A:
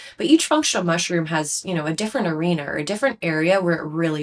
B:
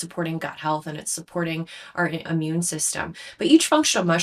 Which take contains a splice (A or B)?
B